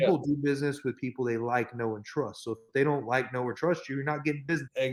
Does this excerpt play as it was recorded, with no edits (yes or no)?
yes